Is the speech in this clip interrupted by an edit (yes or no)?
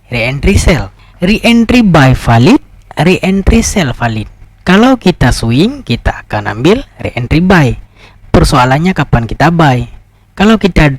yes